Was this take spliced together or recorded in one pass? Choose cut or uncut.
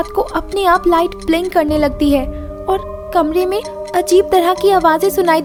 uncut